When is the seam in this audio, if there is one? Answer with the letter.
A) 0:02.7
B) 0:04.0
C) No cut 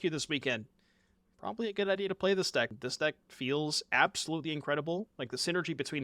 A